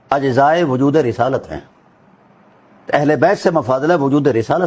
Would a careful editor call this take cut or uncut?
uncut